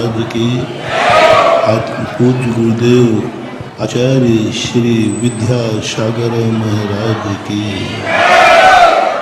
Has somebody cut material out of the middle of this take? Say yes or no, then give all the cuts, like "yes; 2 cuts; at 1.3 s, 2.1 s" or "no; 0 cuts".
yes; 1 cut; at 3.9 s